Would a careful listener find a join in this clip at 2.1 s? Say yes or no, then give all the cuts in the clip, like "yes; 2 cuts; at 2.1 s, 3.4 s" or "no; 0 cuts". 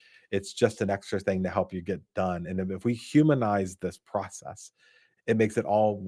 no; 1 cut; at 5.1 s